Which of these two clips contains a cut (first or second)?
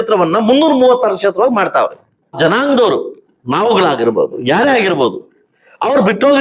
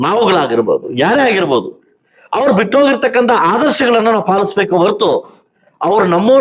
first